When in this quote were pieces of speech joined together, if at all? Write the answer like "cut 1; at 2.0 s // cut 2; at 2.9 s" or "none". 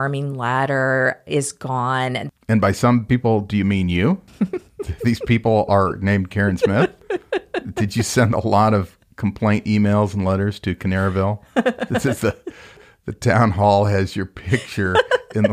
cut 1; at 2.3 s